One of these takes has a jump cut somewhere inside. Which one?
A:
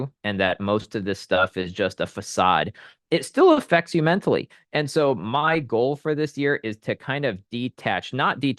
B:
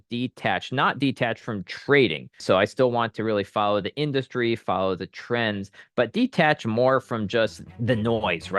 B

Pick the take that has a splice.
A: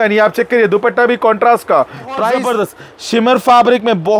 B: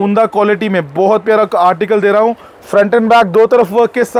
A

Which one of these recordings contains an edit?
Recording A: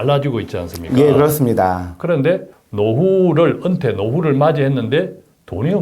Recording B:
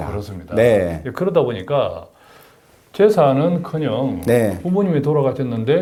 A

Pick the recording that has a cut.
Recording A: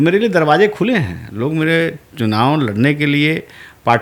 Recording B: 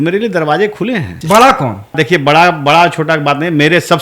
B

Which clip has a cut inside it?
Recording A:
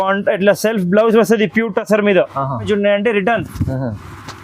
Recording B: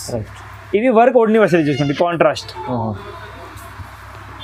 A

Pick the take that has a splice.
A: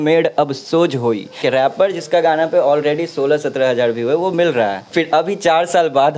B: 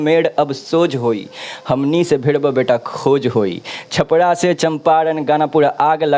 A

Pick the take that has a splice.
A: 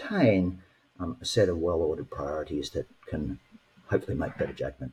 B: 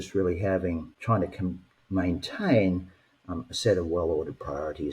B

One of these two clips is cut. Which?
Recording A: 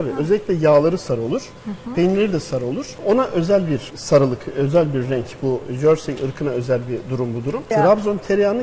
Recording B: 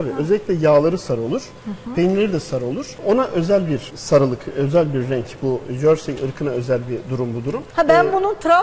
A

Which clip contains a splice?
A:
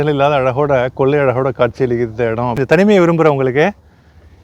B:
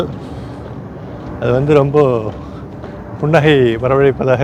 A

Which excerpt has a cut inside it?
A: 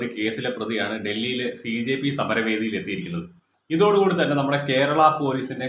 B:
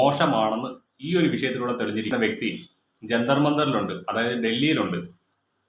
B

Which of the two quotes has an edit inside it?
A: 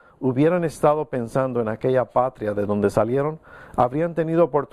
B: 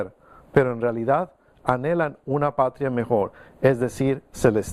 A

